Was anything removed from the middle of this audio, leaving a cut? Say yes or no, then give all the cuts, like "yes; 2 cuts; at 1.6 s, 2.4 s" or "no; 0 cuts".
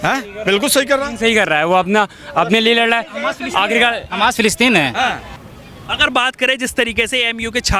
yes; 1 cut; at 5.3 s